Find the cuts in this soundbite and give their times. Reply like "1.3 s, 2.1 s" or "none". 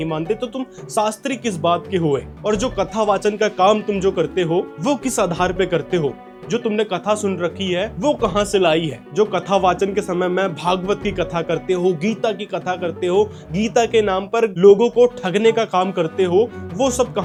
none